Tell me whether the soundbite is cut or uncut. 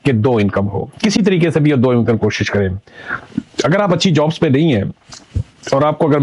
uncut